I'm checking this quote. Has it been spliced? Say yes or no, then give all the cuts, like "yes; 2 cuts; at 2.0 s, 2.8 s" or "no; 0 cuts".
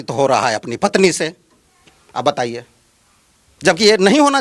no; 0 cuts